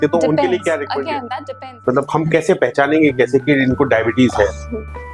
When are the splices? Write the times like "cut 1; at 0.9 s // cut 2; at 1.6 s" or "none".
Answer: cut 1; at 1.6 s